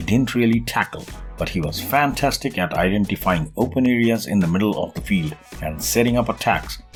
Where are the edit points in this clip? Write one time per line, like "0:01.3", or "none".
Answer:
none